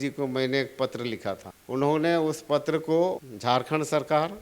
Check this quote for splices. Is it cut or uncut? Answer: cut